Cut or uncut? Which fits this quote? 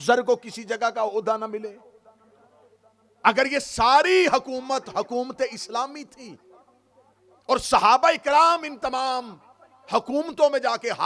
uncut